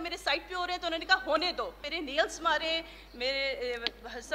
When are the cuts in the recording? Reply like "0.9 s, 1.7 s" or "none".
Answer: 1.8 s